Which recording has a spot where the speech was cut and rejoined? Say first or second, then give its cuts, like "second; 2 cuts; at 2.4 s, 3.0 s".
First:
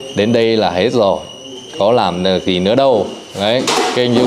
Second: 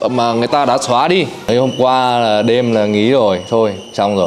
second; 1 cut; at 1.5 s